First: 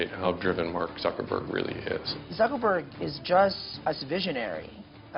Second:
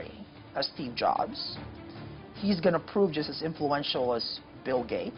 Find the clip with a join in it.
first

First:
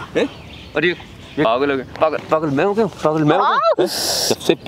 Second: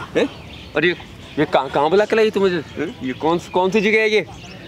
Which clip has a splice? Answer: first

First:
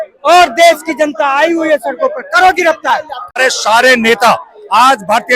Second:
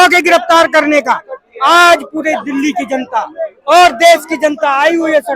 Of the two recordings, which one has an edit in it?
first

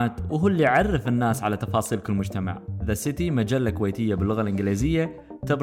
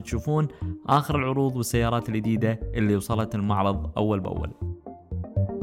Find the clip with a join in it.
second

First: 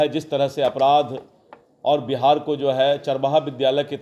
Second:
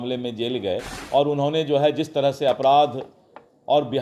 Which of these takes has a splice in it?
second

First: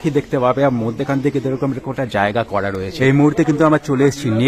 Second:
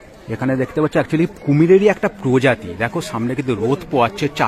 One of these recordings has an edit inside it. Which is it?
first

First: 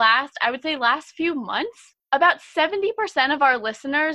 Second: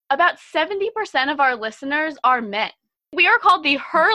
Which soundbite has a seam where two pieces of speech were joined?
second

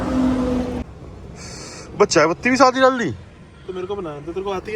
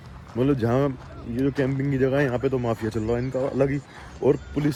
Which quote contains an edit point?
first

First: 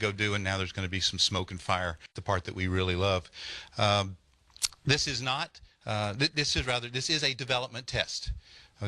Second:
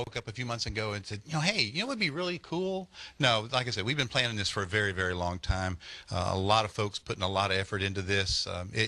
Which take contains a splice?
first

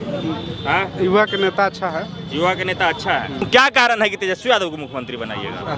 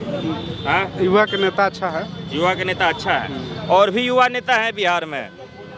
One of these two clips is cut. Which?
first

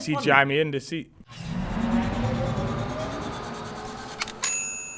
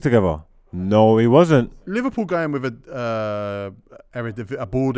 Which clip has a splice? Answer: second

